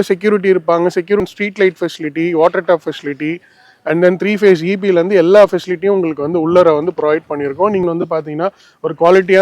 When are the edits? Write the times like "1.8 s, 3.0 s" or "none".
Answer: 1.2 s, 7.8 s